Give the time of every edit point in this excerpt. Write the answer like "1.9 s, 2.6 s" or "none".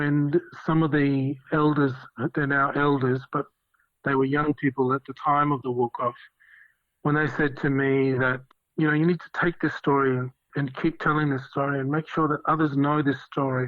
1.4 s, 8.4 s